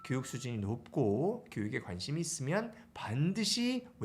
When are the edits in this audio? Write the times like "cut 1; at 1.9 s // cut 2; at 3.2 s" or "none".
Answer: none